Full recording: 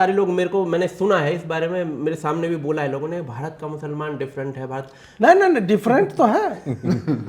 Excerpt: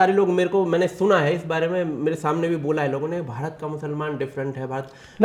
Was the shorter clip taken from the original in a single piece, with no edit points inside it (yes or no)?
yes